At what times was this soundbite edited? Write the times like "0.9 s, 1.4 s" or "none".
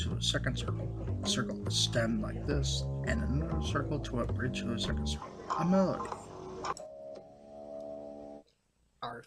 5.5 s